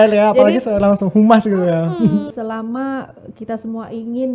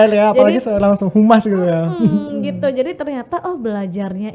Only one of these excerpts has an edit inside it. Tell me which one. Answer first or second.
first